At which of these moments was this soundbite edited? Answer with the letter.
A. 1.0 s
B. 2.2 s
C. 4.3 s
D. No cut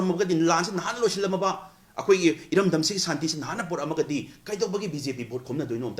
D